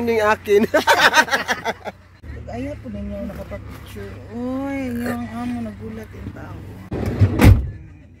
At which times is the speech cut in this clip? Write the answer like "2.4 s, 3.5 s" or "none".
2.3 s, 6.9 s

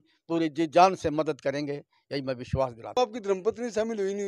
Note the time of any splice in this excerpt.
3.0 s

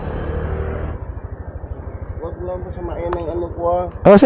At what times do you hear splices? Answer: 0.9 s

